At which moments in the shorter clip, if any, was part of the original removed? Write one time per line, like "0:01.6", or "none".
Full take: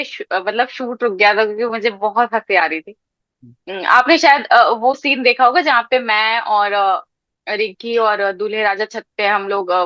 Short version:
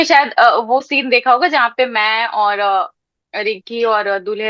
none